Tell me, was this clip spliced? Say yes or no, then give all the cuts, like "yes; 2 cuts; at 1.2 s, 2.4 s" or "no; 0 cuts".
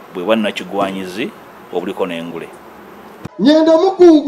yes; 1 cut; at 3.3 s